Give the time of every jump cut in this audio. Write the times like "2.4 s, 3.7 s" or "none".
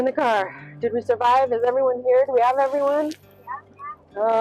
none